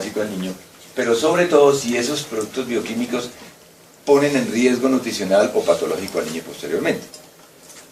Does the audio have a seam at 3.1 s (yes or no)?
yes